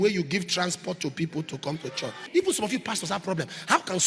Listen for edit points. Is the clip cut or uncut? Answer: cut